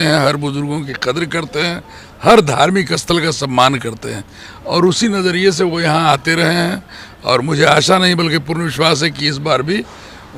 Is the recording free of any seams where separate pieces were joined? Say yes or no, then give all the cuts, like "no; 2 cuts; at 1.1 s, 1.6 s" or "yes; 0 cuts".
yes; 0 cuts